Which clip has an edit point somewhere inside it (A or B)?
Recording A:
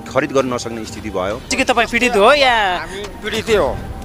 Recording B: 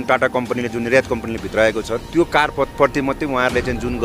A